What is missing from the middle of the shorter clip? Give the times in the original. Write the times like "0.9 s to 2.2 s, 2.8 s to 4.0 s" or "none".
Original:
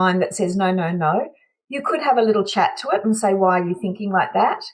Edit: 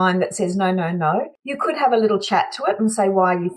1.4 s to 1.7 s